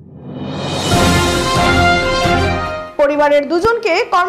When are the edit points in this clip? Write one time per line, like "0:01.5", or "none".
0:02.2

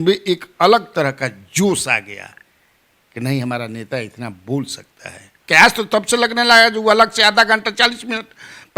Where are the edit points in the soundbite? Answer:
0:05.4

